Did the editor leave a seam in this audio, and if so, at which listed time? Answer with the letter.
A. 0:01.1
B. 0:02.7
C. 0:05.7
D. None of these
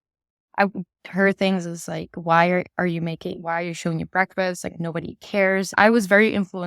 C